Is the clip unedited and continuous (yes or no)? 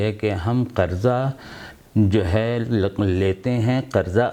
yes